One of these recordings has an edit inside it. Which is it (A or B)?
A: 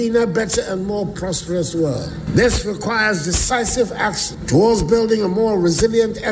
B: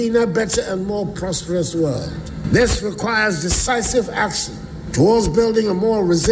A